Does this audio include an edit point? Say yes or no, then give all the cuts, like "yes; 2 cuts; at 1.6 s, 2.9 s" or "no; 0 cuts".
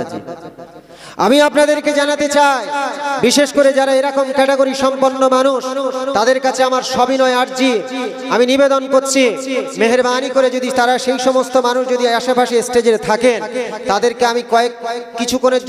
no; 0 cuts